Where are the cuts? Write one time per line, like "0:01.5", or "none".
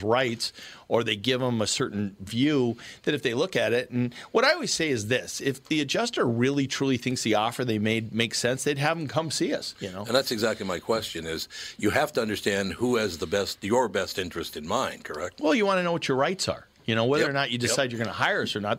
none